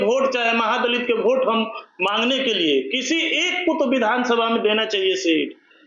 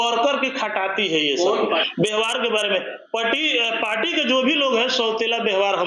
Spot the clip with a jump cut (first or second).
second